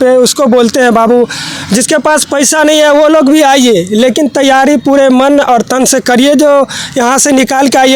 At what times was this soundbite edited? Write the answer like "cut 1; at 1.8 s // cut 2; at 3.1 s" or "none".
none

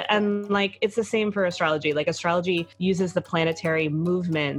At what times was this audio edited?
cut 1; at 2.7 s

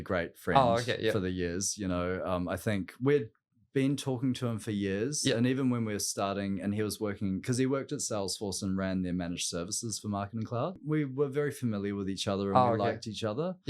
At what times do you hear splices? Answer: cut 1; at 10.8 s

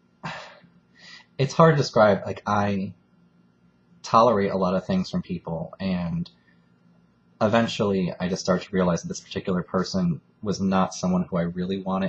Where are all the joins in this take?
none

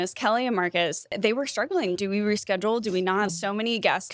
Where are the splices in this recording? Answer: cut 1; at 1.1 s

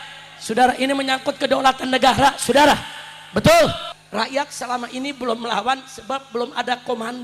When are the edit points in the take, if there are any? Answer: cut 1; at 3.9 s

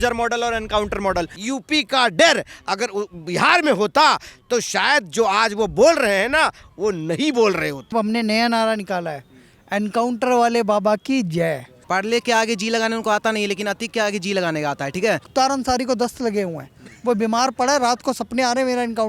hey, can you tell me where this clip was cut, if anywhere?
cut 1; at 1.4 s // cut 2; at 7.9 s // cut 3; at 11.7 s // cut 4; at 15.3 s

